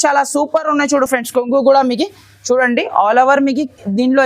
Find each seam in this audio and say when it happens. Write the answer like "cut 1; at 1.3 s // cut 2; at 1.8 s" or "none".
none